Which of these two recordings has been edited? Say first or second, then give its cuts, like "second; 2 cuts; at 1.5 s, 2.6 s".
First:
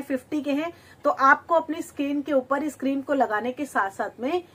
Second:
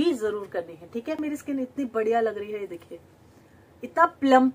second; 1 cut; at 1.2 s